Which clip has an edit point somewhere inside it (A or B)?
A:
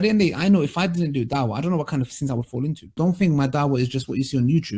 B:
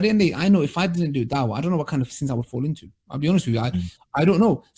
A